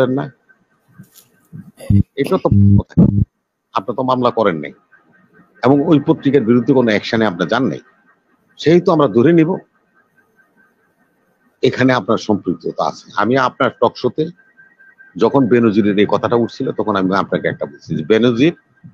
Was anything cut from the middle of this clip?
no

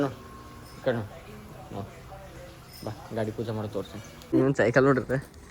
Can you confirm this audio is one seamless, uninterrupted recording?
no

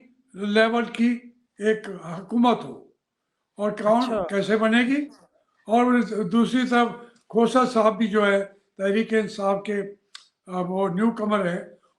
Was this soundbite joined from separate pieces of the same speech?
no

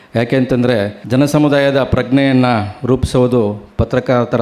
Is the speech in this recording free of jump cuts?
no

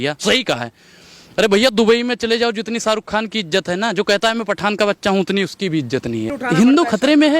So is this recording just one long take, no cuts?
no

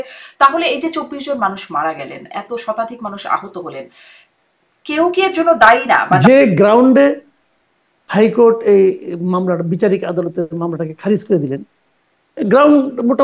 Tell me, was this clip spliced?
yes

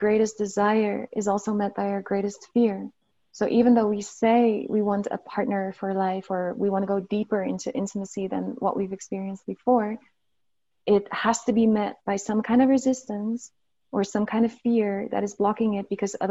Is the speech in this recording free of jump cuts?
yes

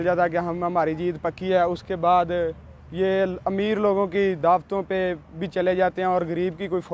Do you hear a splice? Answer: no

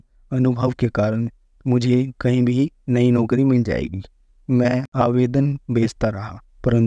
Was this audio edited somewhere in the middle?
yes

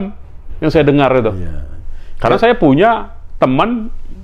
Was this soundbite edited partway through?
no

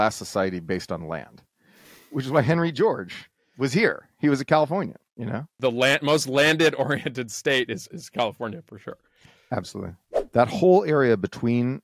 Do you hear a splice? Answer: yes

